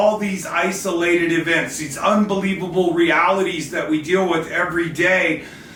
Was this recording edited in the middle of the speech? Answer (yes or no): no